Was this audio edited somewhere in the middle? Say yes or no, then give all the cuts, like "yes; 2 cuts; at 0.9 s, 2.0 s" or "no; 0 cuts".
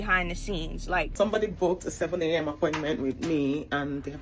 yes; 1 cut; at 1.1 s